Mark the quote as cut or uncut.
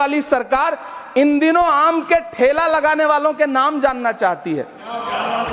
uncut